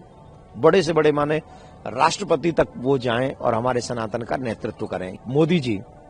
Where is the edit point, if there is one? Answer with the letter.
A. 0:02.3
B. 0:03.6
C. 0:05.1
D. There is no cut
C